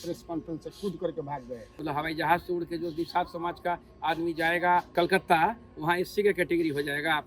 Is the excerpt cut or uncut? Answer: cut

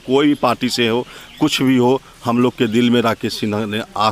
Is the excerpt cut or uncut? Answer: uncut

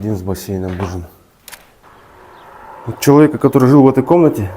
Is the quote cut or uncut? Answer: cut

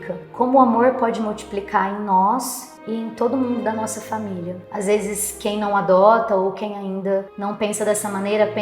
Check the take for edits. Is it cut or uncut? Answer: cut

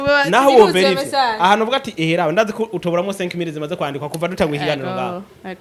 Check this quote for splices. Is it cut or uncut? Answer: uncut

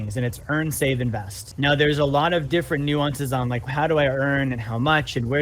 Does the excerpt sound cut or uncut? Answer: cut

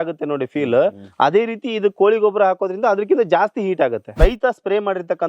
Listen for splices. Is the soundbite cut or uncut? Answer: cut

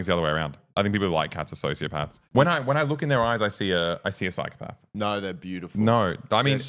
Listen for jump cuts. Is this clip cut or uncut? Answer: uncut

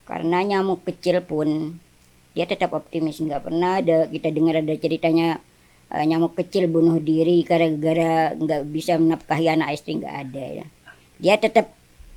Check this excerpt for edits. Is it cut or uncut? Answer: uncut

